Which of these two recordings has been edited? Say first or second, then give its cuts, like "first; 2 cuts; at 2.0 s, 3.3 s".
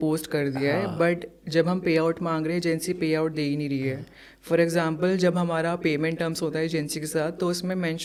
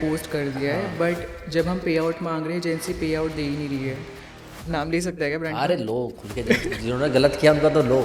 second; 1 cut; at 4.5 s